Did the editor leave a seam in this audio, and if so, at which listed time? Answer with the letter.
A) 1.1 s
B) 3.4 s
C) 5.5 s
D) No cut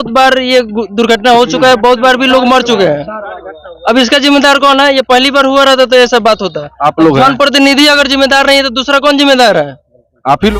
D